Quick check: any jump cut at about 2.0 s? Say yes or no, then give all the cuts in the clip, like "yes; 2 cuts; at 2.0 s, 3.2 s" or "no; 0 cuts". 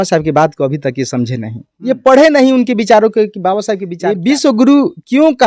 no; 1 cut; at 3.8 s